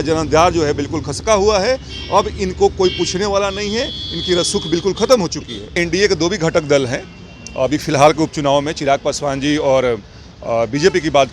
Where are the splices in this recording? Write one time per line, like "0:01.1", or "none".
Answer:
0:05.8